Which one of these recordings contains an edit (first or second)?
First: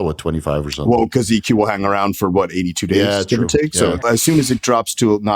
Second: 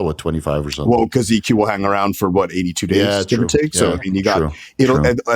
first